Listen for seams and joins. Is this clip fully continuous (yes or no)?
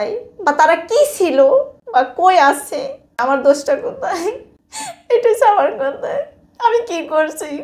no